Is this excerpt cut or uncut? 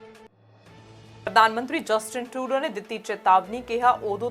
cut